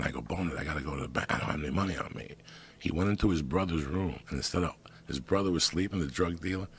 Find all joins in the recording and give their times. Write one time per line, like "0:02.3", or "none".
0:03.5